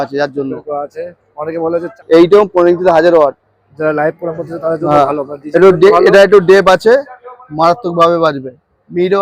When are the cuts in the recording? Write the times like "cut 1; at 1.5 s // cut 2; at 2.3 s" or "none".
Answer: cut 1; at 1.9 s